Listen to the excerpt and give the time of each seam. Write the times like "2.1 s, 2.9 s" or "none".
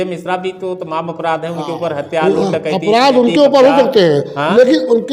none